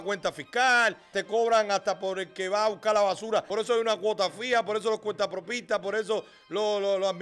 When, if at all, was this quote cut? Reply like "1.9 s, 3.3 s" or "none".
1.2 s, 3.5 s